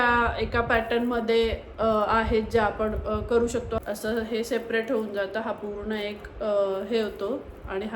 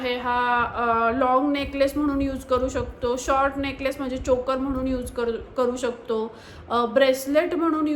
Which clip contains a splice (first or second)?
first